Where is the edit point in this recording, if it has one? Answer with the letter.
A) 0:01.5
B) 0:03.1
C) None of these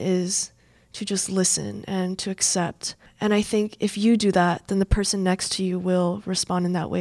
B